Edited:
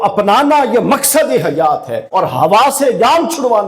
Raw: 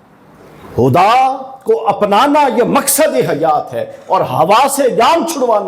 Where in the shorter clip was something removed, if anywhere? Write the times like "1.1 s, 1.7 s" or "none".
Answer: 2.0 s